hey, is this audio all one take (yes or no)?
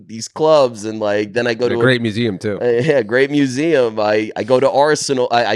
yes